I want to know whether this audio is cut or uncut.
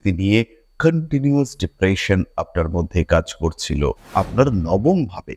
cut